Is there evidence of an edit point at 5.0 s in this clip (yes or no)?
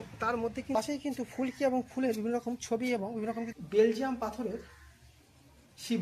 no